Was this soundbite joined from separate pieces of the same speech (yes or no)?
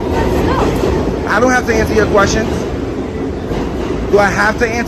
no